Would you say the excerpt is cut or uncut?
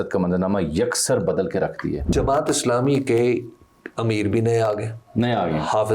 cut